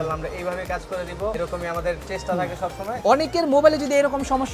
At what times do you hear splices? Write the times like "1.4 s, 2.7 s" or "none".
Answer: 1.3 s, 3.0 s